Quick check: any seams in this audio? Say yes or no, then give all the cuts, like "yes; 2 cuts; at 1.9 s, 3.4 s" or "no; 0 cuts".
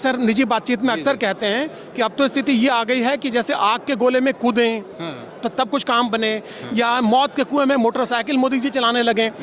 no; 0 cuts